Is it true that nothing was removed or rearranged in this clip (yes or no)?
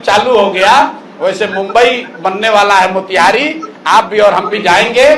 yes